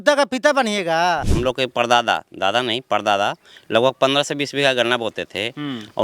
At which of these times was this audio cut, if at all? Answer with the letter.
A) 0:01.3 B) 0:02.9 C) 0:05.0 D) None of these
A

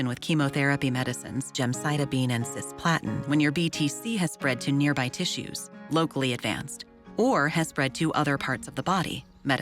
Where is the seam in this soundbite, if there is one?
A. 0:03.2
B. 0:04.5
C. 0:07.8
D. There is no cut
A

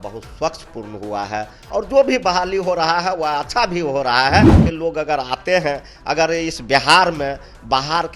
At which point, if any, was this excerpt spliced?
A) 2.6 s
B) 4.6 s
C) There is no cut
B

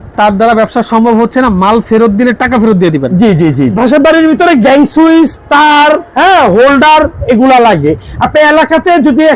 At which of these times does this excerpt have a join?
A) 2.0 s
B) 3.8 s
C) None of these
B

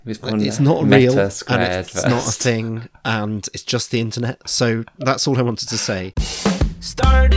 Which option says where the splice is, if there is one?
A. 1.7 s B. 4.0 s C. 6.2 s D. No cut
C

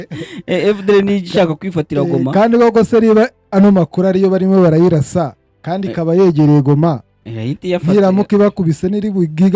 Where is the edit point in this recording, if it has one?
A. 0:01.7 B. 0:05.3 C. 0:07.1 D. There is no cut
D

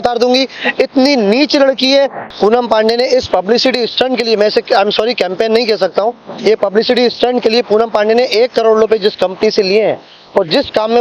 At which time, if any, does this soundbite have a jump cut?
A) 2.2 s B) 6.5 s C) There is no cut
A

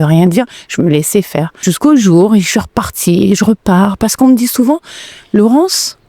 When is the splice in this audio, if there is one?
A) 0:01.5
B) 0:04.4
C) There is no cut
A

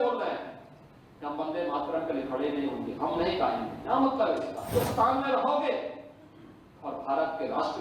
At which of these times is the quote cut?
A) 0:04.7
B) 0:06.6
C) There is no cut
A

